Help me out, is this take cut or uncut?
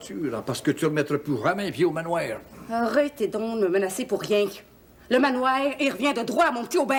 uncut